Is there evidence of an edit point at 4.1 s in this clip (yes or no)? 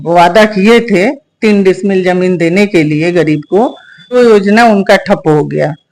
yes